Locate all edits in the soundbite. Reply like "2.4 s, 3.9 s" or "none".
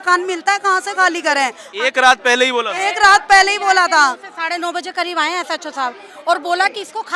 none

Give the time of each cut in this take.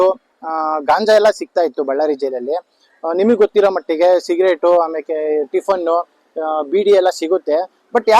none

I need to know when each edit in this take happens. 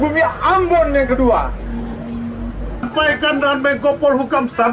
2.9 s

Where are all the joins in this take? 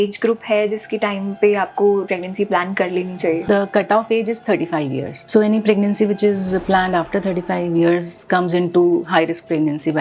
2.0 s, 3.4 s, 5.2 s

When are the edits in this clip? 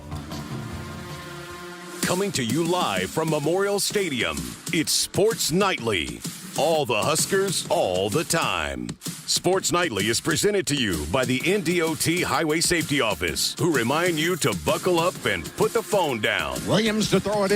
1.1 s

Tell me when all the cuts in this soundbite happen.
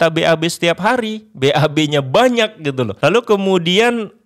2.9 s

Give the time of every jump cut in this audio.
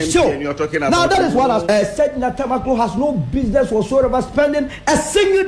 1.7 s

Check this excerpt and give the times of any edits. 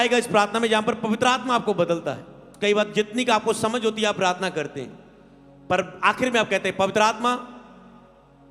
2.4 s

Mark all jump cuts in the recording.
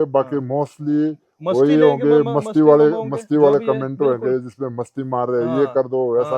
none

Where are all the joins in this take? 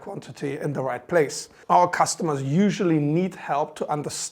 1.5 s

